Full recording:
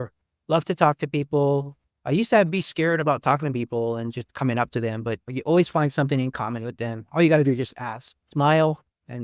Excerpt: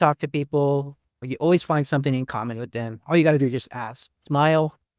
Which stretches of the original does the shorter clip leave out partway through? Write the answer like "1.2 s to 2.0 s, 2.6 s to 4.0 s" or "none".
1.9 s to 5.2 s